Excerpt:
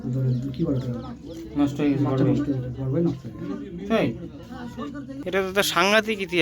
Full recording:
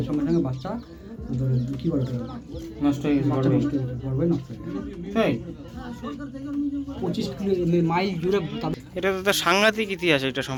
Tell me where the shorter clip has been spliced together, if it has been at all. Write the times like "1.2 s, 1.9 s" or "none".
5.1 s